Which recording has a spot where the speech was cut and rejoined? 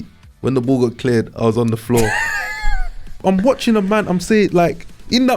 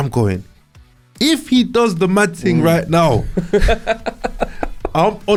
first; 1 cut; at 3.2 s

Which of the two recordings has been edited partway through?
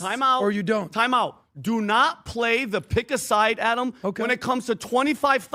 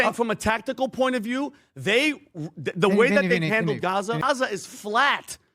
second; 1 cut; at 4.2 s

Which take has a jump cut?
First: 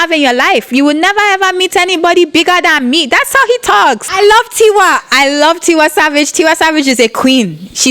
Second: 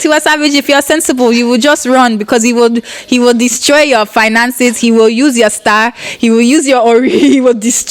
first; 1 cut; at 4.1 s

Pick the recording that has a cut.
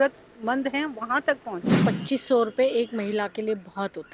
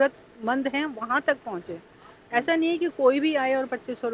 first; 1 cut; at 1.7 s

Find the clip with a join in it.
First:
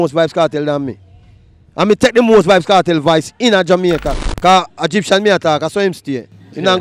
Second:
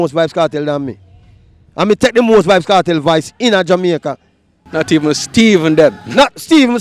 first; 1 cut; at 4.2 s

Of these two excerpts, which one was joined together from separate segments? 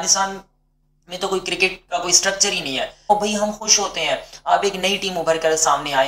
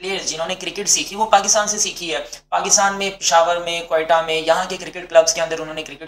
first; 1 cut; at 3.1 s

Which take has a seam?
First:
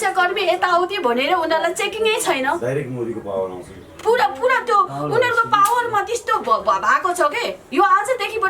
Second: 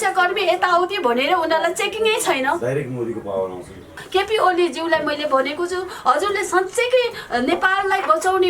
second; 1 cut; at 4.0 s

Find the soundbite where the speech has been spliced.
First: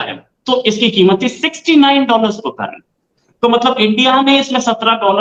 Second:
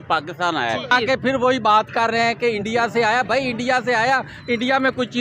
second; 1 cut; at 0.9 s

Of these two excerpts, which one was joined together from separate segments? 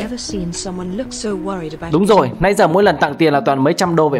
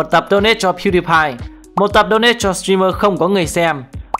second; 1 cut; at 1.7 s

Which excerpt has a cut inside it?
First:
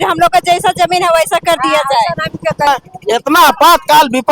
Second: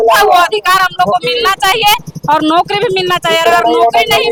first; 1 cut; at 2.7 s

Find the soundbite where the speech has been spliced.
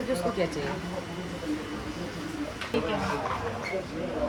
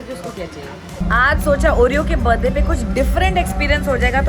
second; 1 cut; at 1.0 s

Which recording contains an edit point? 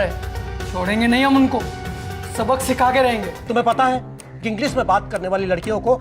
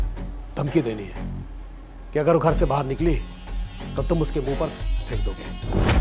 first; 1 cut; at 3.4 s

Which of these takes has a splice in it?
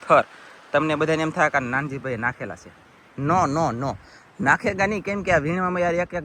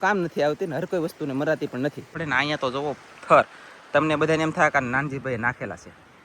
second; 1 cut; at 2.1 s

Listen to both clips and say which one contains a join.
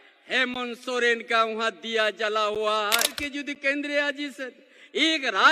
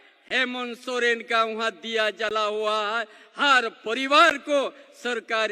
first; 1 cut; at 3.2 s

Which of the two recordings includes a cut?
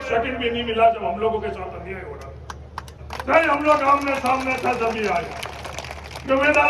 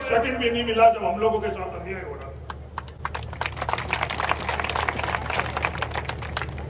first; 1 cut; at 2.9 s

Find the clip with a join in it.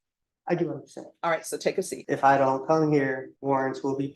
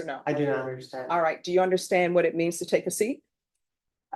first; 2 cuts; at 2.0 s, 3.3 s

